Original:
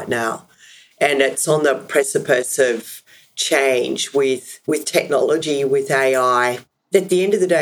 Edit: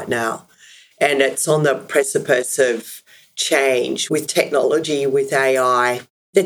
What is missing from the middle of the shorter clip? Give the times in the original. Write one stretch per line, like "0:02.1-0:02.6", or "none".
0:04.0-0:04.6